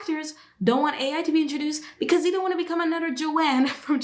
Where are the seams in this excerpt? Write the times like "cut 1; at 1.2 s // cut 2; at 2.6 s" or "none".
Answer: none